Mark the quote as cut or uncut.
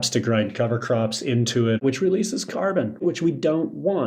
cut